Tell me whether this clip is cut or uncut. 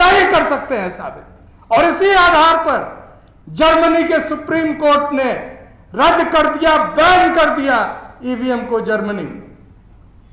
uncut